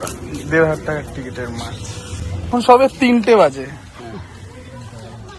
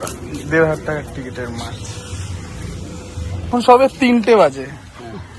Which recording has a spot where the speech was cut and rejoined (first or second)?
first